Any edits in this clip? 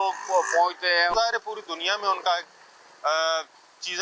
yes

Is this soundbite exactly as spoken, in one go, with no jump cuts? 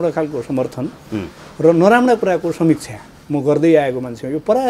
yes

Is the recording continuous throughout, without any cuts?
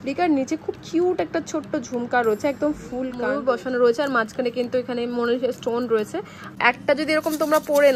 no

